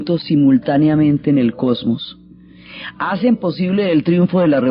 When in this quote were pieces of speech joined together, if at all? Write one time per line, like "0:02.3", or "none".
0:01.0